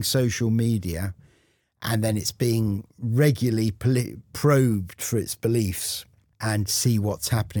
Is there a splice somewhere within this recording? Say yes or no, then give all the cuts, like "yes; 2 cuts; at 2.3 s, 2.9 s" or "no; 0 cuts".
no; 0 cuts